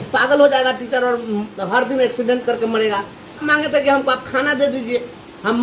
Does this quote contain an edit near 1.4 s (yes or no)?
no